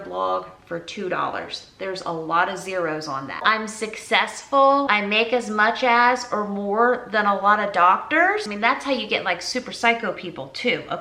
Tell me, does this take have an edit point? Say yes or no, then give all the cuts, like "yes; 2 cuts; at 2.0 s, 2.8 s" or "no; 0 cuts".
yes; 3 cuts; at 3.4 s, 4.9 s, 8.5 s